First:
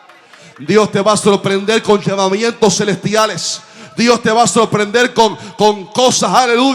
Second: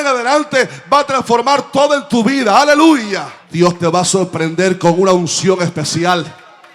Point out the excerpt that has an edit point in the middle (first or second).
second